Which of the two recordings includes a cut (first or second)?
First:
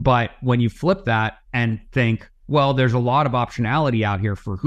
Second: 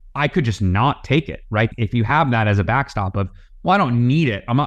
first